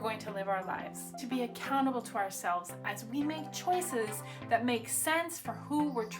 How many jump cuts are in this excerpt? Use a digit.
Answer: 1